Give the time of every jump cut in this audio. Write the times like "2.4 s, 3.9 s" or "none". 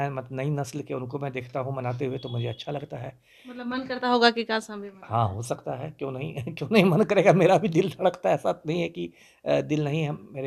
none